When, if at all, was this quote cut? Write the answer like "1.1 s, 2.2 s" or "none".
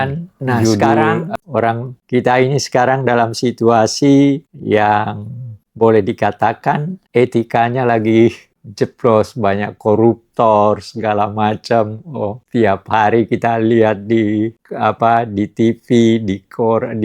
1.3 s